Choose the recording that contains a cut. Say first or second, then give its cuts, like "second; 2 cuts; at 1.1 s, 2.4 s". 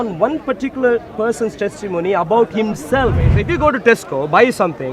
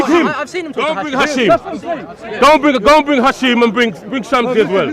first; 1 cut; at 3.4 s